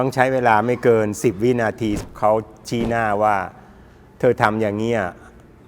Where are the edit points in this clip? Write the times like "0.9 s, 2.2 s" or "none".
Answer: 2.0 s